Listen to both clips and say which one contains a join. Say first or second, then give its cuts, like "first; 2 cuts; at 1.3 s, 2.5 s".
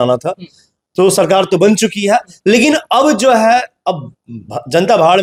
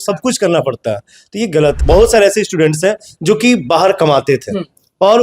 second; 1 cut; at 1.8 s